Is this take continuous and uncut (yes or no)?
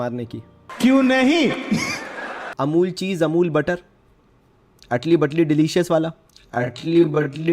no